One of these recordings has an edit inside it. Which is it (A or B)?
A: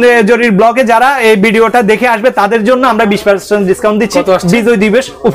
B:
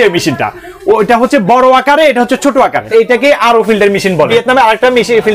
B